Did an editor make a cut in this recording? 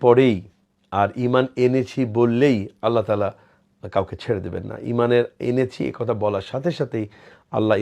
no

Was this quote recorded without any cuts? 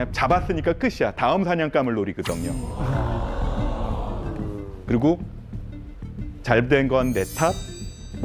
yes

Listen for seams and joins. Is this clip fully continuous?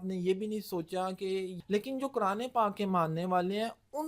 no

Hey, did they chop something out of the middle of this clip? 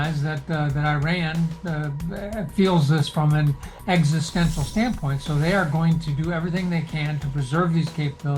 no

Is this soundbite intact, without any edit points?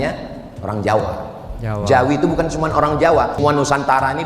no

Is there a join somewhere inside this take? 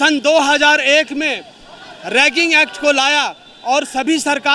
no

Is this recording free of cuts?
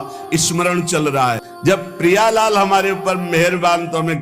no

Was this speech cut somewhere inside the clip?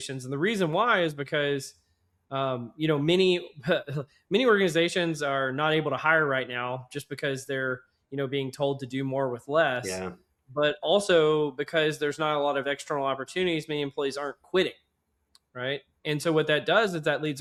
no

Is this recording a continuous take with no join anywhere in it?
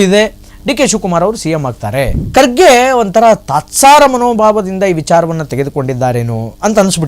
no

